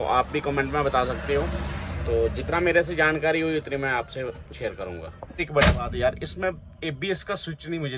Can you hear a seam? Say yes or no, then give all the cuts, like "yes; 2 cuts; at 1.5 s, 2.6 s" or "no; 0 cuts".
yes; 1 cut; at 5.4 s